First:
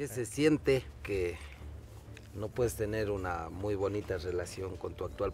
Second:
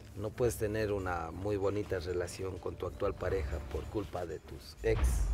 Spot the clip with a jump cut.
first; 1 cut; at 1.0 s

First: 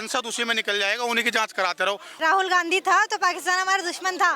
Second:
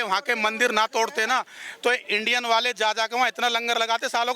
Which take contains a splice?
first; 1 cut; at 2.1 s

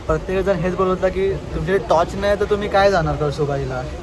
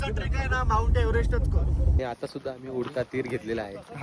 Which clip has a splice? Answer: second; 1 cut; at 2.0 s

